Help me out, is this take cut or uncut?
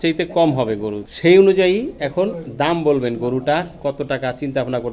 cut